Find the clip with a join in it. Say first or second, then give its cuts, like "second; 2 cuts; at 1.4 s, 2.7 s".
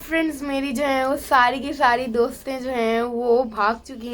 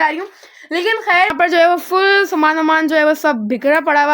second; 1 cut; at 1.3 s